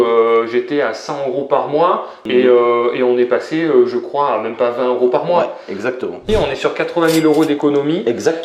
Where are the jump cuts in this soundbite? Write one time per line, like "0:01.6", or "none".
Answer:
0:02.2
0:06.3